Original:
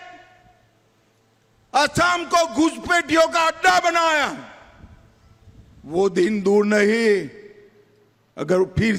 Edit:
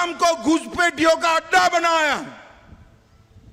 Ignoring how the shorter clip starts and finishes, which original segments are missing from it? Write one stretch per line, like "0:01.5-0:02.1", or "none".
none

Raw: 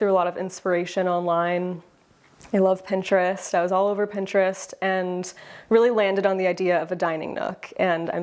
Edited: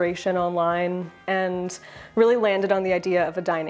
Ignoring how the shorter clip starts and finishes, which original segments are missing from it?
0:01.9-0:04.7

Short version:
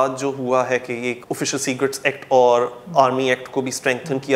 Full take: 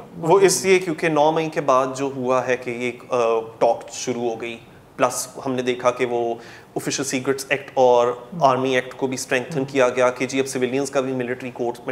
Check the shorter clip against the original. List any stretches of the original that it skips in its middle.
0:02.9-0:06.6

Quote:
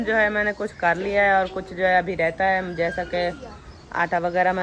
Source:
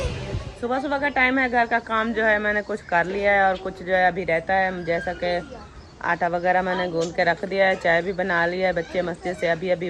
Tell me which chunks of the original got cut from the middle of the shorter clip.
none

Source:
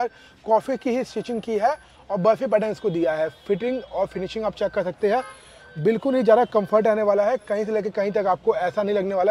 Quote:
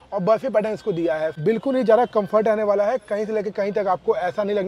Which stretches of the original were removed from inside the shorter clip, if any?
0:03.3-0:05.8

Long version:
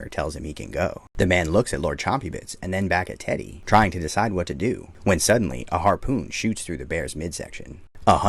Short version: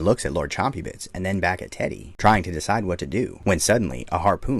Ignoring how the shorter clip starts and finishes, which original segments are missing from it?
0:04.8-0:04.9

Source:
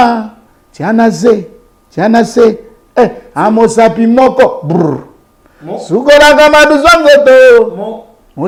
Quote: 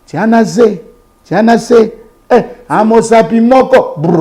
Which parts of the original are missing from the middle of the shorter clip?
none

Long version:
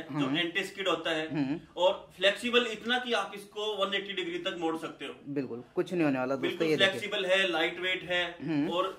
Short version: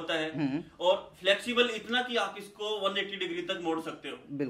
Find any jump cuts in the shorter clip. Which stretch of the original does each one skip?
none

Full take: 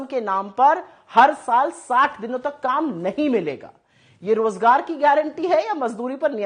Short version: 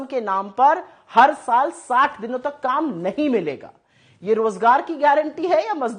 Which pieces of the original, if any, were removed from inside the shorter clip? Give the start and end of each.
none

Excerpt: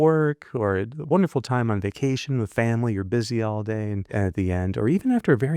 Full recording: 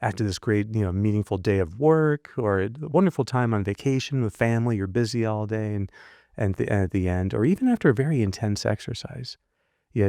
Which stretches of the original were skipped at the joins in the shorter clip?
0:06.0-0:06.7

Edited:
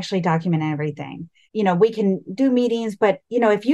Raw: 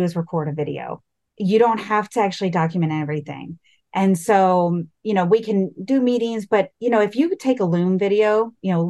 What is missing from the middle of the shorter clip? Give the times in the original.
0:03.7-0:04.9

